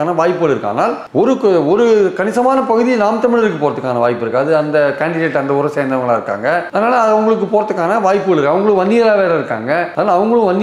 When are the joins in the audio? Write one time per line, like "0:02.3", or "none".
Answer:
none